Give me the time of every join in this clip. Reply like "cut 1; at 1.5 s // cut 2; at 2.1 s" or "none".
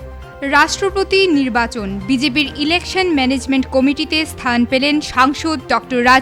none